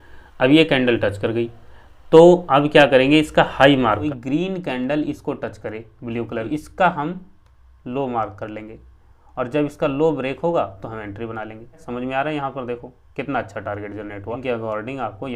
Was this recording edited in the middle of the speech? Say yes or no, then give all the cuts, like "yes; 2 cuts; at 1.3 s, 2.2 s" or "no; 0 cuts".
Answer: yes; 4 cuts; at 4.0 s, 6.5 s, 11.8 s, 14.4 s